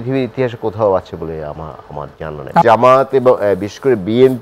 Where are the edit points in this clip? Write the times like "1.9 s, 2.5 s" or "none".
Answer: 2.6 s